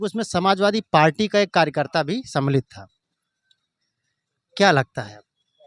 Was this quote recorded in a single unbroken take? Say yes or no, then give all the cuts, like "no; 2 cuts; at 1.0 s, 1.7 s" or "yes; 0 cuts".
yes; 0 cuts